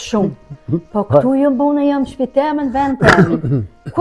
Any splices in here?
no; 0 cuts

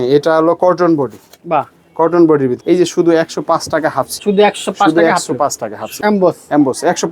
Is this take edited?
yes; 3 cuts; at 2.6 s, 4.1 s, 5.9 s

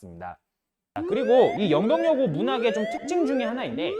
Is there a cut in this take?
yes; 1 cut; at 1.0 s

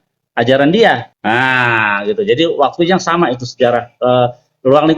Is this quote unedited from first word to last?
no; 1 cut; at 1.1 s

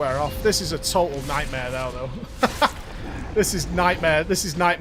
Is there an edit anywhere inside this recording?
no; 0 cuts

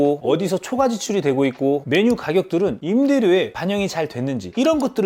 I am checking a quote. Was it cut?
no; 0 cuts

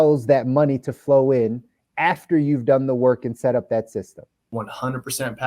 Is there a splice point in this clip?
yes; 1 cut; at 4.5 s

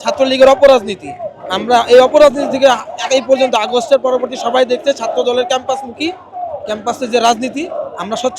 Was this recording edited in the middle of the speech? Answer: no; 0 cuts

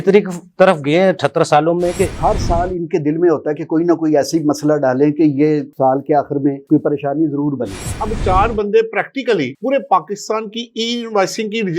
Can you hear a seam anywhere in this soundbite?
yes; 2 cuts; at 2.1 s, 7.9 s

